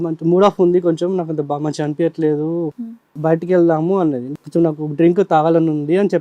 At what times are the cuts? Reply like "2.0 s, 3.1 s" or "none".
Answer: 3.1 s, 4.3 s